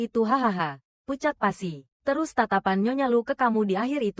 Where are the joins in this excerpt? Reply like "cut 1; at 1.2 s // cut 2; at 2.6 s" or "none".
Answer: cut 1; at 1.9 s